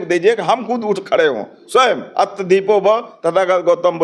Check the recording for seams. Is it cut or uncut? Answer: uncut